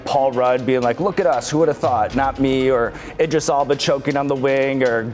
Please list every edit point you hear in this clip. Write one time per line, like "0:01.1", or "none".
none